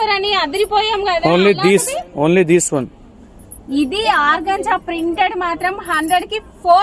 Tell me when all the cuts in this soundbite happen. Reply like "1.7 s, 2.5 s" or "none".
none